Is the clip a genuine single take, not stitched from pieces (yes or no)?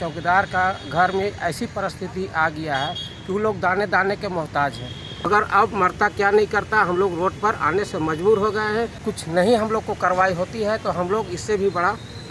no